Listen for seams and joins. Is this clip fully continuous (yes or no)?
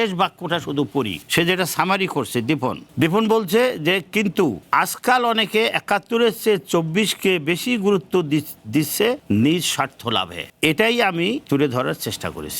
no